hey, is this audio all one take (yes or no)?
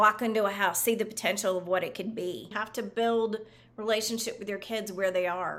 no